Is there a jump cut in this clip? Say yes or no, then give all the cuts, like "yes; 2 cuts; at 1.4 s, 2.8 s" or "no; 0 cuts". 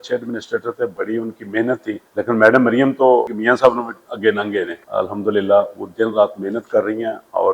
yes; 4 cuts; at 0.9 s, 2.0 s, 3.7 s, 4.8 s